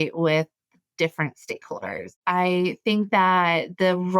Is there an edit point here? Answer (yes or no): yes